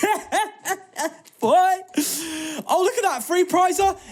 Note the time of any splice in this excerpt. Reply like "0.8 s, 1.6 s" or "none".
none